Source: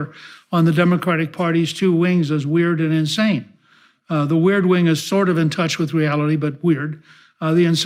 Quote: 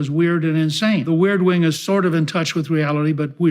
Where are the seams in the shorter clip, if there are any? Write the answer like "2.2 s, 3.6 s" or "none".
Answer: 1.0 s